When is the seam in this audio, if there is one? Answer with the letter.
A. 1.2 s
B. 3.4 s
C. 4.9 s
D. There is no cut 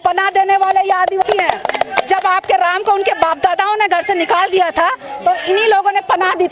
A